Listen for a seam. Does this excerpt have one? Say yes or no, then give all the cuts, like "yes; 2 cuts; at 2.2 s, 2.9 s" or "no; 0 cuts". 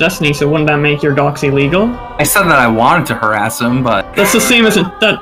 yes; 1 cut; at 4.0 s